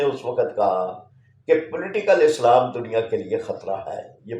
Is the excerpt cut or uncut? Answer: uncut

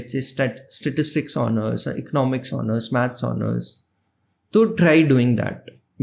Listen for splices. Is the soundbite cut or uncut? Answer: uncut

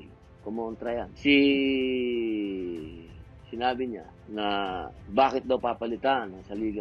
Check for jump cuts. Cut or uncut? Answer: cut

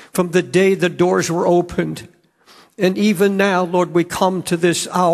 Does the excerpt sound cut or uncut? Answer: uncut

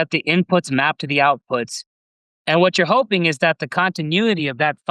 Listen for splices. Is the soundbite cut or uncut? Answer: uncut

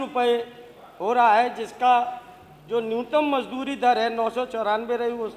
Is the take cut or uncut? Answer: uncut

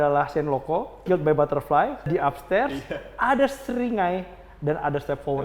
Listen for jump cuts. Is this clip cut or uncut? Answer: cut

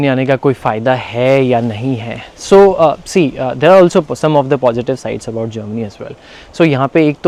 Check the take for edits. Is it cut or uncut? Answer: uncut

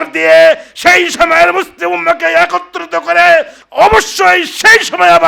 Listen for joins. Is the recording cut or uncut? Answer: cut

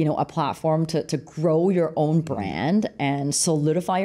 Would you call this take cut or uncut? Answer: uncut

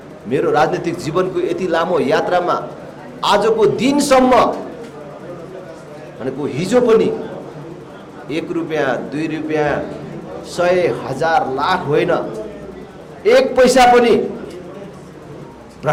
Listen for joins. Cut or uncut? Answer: uncut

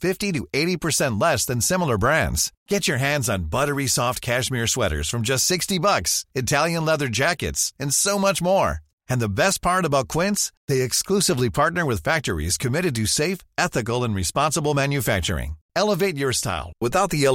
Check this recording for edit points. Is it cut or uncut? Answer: uncut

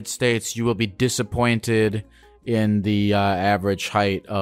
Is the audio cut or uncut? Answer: uncut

